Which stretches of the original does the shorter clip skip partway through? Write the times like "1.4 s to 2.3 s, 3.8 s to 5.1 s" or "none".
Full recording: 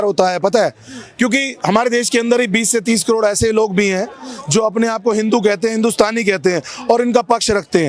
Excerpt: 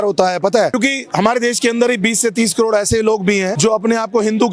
0.8 s to 1.3 s, 4.0 s to 4.4 s